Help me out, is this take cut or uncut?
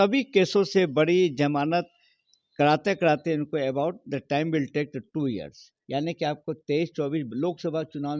uncut